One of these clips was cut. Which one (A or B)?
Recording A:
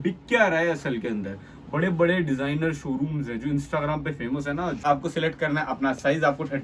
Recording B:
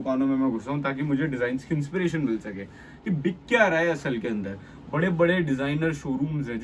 A